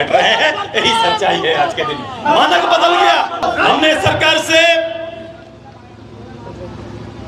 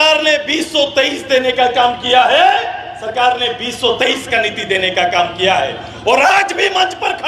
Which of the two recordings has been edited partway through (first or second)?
first